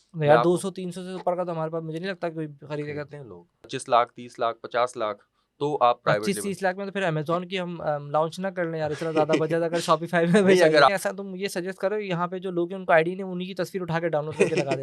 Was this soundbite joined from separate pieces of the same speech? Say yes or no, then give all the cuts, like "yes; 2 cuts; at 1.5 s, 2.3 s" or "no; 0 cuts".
yes; 2 cuts; at 3.7 s, 10.9 s